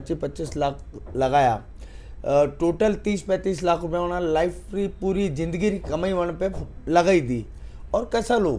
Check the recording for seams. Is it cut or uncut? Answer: uncut